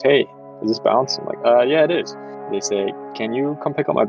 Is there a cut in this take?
yes; 2 cuts; at 1.3 s, 2.6 s

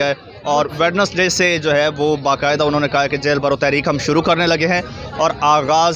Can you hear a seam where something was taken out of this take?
no; 0 cuts

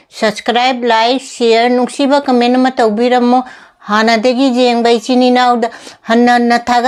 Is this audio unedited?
yes; 0 cuts

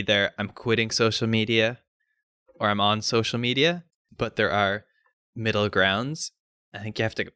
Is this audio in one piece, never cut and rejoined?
no; 1 cut; at 4.0 s

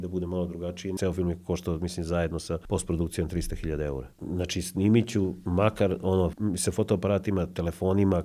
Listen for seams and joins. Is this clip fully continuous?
no; 5 cuts; at 1.0 s, 2.6 s, 4.1 s, 5.4 s, 6.4 s

